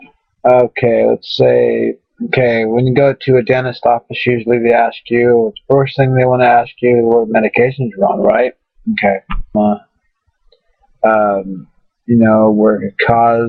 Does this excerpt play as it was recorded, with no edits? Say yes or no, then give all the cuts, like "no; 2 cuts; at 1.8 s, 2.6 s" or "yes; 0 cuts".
yes; 0 cuts